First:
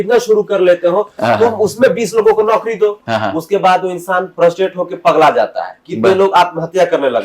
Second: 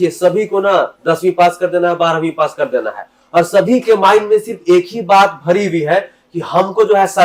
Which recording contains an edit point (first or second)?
first